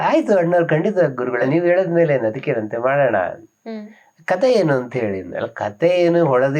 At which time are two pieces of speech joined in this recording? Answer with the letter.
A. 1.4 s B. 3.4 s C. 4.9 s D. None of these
A